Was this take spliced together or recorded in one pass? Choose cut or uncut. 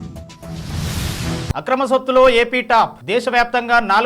cut